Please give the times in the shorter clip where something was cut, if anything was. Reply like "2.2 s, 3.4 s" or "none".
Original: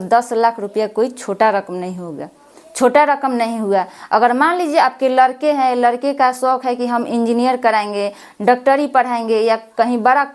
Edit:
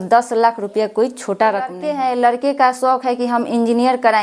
1.8 s